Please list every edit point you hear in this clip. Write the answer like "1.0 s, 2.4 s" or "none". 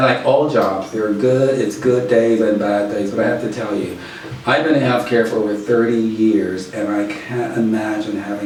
none